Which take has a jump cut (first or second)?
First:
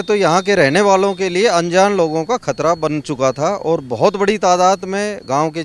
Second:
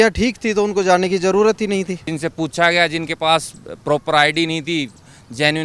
second